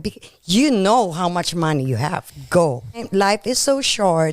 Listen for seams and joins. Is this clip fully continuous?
no; 2 cuts; at 2.3 s, 3.1 s

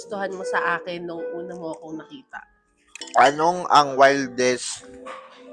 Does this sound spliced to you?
yes; 1 cut; at 3.0 s

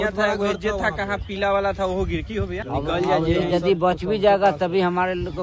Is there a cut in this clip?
yes; 1 cut; at 2.6 s

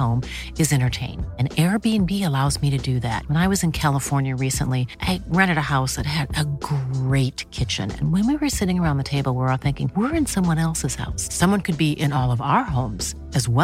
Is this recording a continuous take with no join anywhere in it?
yes; 0 cuts

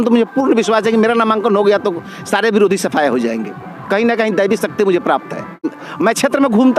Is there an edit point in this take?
yes; 1 cut; at 5.7 s

